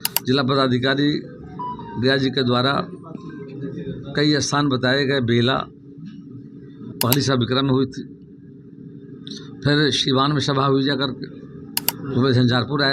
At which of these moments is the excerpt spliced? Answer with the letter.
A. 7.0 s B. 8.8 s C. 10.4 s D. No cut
A